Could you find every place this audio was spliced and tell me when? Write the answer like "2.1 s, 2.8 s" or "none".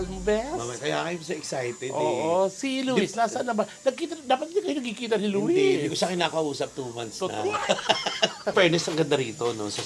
8.5 s